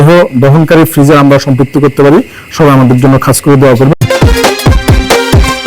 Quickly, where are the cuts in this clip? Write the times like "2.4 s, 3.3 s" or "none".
3.9 s

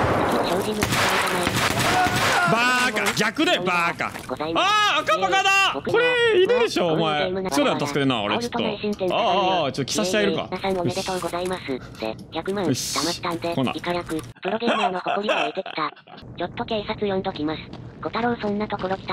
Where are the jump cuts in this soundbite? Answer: 4.2 s, 5.9 s, 7.5 s, 14.3 s, 16.1 s

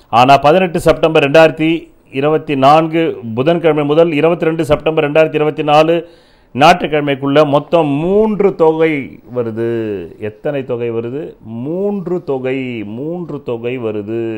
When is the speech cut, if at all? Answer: none

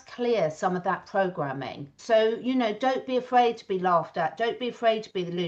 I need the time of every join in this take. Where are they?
1.9 s

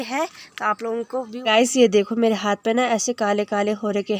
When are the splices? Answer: 1.3 s

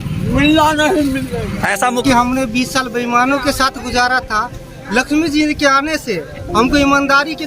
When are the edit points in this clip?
2.0 s

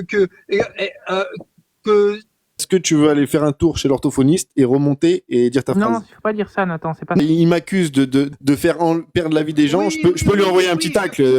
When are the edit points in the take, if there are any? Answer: 2.6 s, 7.2 s, 8.3 s

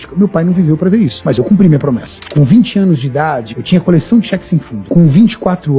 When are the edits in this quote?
1.2 s, 2.2 s, 3.5 s, 4.7 s

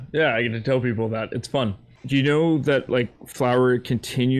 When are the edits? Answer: 1.9 s

